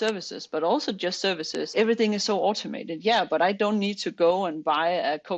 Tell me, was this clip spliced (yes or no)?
yes